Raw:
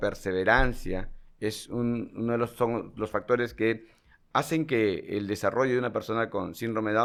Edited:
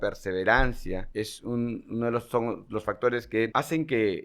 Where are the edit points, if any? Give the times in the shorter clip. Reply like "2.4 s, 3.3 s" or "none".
1.1 s, 3.5 s